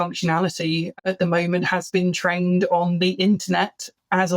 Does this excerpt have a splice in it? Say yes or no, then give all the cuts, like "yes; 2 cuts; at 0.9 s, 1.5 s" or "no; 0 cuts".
yes; 1 cut; at 1.0 s